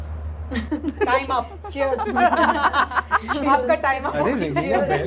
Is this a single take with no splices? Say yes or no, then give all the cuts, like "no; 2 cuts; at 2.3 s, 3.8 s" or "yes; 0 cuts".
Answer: yes; 0 cuts